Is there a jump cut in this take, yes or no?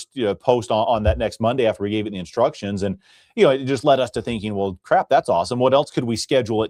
no